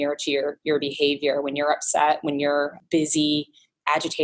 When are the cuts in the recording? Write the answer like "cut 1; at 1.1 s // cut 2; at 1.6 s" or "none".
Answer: cut 1; at 2.8 s